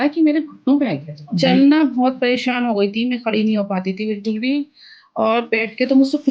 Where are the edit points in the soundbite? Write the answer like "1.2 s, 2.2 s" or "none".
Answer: 1.3 s